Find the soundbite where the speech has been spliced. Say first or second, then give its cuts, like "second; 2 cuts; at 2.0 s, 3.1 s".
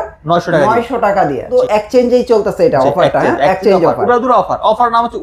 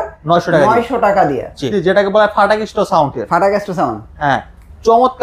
second; 1 cut; at 1.6 s